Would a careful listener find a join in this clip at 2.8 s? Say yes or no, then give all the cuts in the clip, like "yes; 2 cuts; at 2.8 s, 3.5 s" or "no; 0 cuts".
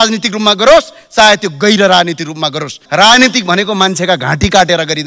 yes; 1 cut; at 2.8 s